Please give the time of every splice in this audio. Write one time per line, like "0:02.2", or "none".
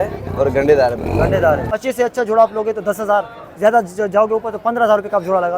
0:01.7